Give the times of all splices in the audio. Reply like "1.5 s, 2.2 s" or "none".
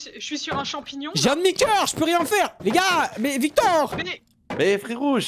2.5 s